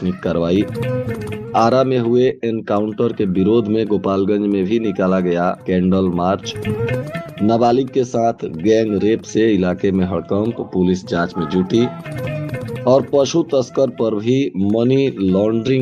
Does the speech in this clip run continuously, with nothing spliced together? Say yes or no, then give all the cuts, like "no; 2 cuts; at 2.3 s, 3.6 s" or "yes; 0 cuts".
yes; 0 cuts